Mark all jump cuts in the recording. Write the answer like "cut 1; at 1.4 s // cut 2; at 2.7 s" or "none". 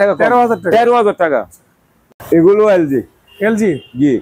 none